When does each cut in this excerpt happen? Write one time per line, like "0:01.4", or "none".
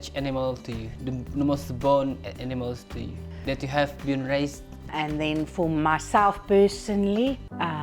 0:04.8